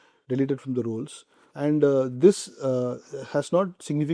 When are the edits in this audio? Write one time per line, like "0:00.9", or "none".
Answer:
none

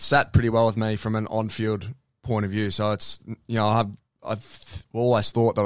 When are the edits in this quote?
none

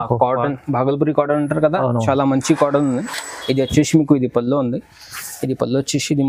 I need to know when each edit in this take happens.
none

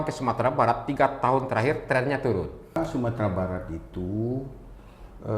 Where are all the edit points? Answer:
0:02.8

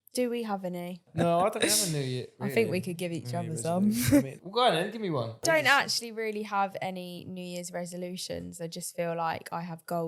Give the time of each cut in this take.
0:01.1
0:02.3
0:04.4
0:05.4

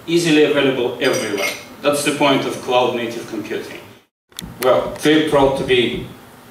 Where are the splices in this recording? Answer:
0:04.2

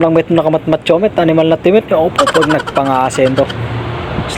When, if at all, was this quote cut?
none

